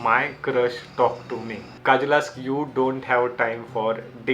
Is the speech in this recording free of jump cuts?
no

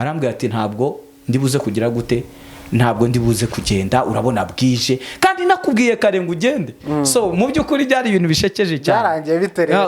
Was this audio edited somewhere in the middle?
no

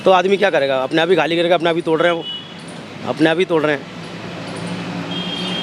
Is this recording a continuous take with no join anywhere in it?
yes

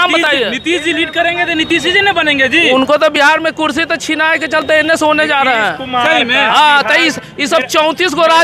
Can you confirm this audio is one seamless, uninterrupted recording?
yes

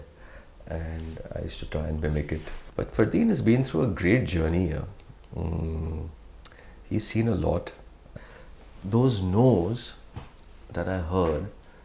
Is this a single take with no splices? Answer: no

